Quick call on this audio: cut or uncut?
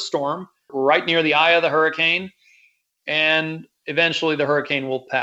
uncut